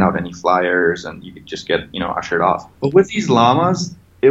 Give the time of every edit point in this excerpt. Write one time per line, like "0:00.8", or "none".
0:02.7